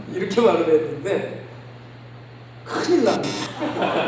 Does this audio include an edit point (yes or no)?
no